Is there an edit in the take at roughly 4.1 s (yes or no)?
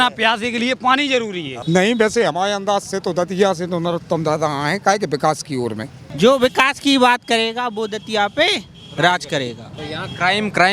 no